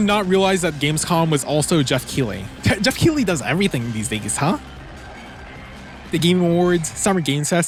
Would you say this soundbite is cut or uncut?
uncut